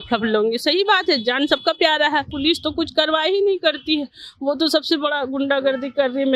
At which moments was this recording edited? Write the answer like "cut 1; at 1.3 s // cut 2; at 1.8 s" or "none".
cut 1; at 2.3 s